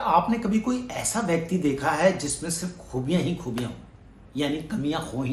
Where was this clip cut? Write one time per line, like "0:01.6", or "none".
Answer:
none